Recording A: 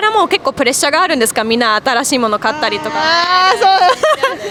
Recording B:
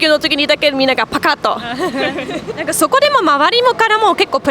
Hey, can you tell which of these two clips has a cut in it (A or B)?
B